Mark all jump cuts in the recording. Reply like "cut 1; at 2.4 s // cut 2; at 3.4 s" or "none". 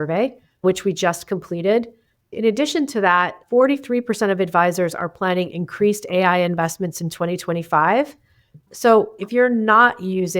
cut 1; at 9.1 s

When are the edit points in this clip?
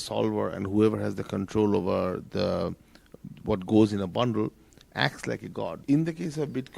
cut 1; at 5.8 s

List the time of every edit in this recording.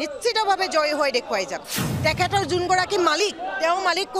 cut 1; at 1.8 s

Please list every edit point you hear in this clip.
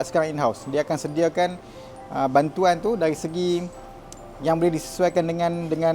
none

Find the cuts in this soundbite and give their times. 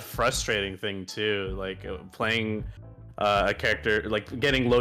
none

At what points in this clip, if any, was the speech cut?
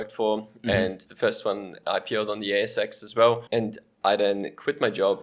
cut 1; at 3.4 s

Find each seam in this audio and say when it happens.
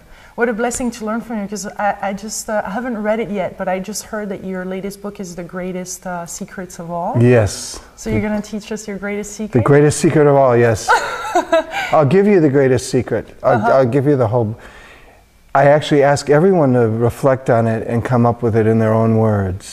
cut 1; at 2.2 s

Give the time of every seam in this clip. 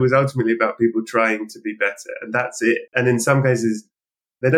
cut 1; at 2.9 s

